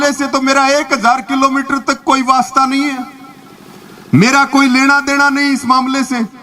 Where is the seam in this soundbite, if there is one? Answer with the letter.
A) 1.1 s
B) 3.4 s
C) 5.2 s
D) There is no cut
D